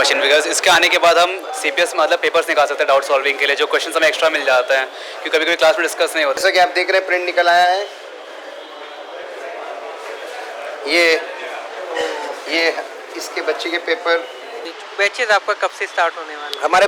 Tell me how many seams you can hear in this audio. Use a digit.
2